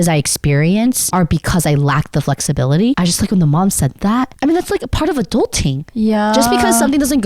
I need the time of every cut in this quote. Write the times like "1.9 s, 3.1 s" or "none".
1.0 s, 3.0 s